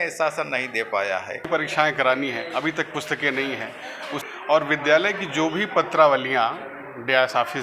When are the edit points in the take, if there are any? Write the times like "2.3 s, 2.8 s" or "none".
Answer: 1.5 s, 4.2 s